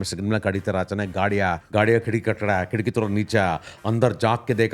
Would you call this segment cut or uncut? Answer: cut